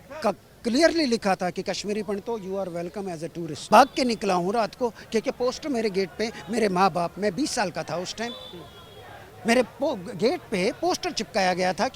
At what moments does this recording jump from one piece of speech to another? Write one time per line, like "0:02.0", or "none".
0:03.5